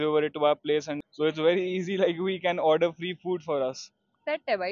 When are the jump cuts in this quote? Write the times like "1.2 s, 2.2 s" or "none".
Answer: 1.0 s